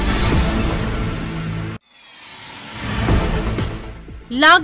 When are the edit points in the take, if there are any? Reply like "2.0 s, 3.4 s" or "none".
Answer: 1.4 s, 3.5 s